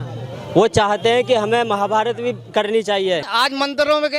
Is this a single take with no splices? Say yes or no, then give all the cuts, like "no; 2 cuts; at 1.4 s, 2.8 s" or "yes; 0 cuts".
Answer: no; 1 cut; at 3.3 s